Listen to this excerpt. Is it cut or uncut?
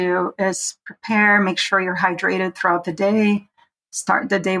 uncut